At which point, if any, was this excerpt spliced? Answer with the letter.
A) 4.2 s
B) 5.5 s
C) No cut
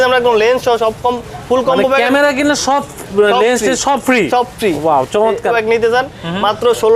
B